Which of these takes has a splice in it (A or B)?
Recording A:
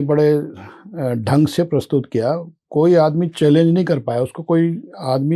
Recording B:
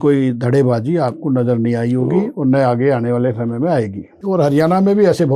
B